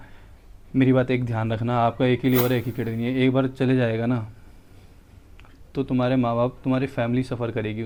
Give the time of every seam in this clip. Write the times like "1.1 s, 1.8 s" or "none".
none

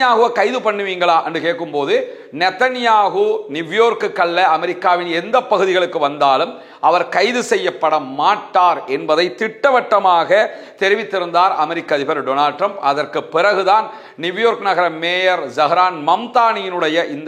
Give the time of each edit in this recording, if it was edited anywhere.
none

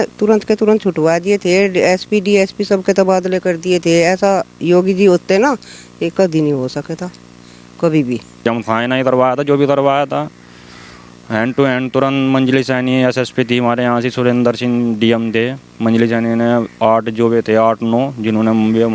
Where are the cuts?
8.4 s

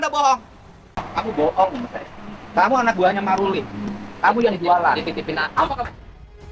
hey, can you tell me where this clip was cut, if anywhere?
0.9 s

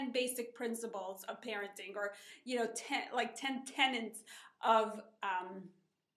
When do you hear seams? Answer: 1.3 s

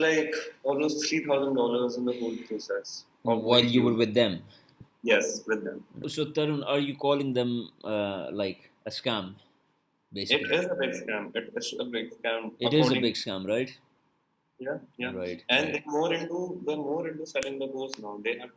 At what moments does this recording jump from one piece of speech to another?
6.0 s

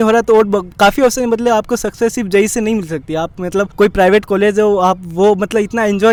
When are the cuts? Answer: none

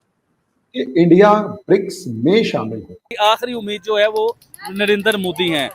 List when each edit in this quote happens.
3.1 s

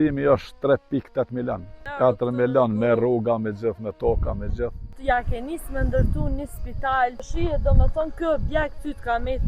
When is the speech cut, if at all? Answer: 1.8 s, 4.9 s, 7.3 s

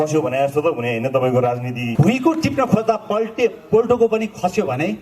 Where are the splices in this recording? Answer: 1.9 s

